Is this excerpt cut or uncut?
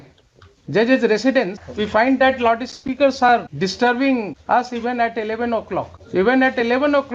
cut